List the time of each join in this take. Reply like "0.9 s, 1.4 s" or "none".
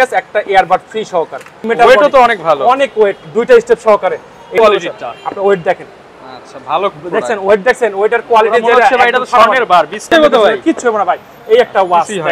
1.7 s, 4.5 s, 10.1 s